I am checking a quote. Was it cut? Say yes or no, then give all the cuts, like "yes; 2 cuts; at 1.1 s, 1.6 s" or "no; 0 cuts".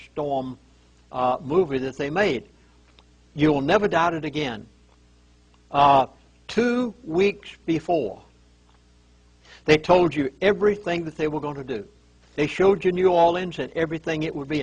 yes; 1 cut; at 4.8 s